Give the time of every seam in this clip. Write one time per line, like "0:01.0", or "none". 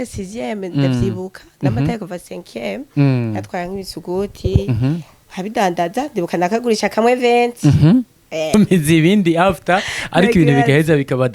0:08.5